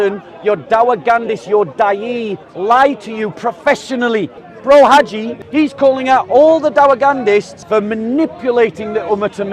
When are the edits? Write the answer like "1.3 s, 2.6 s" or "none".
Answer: 4.4 s, 5.3 s, 7.6 s

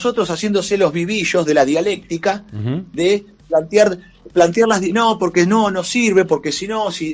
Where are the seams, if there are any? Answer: none

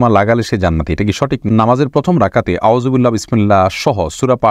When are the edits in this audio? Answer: 1.4 s

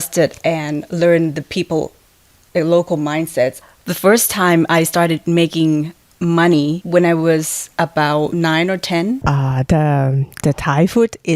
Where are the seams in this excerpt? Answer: 3.6 s, 6.8 s, 8.3 s, 9.2 s

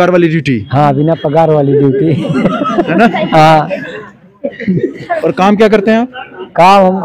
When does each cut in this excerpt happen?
none

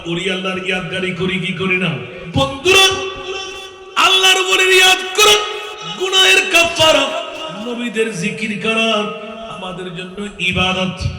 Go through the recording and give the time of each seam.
2.1 s

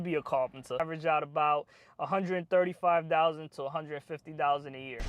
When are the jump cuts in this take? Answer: 0.9 s

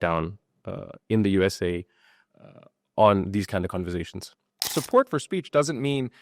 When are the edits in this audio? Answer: 4.6 s

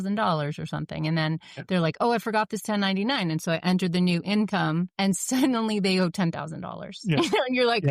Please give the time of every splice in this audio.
4.9 s

